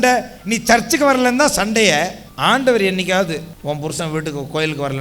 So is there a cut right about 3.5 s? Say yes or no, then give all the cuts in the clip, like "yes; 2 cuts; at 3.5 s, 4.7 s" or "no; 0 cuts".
yes; 2 cuts; at 2.2 s, 3.5 s